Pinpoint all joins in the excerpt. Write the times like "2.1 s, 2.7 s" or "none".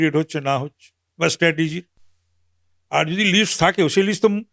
none